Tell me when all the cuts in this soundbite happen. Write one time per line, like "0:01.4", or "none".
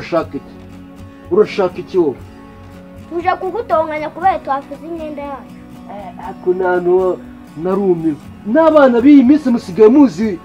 none